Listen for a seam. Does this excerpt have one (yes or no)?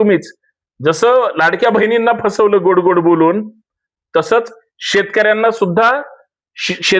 no